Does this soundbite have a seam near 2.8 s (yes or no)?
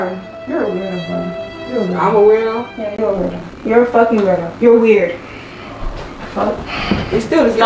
no